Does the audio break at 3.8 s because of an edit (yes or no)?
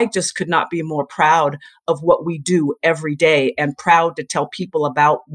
no